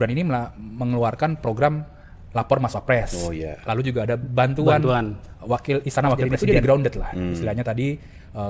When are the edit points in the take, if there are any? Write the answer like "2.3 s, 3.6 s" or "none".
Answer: 6.3 s